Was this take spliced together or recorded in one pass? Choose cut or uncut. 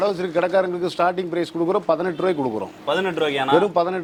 uncut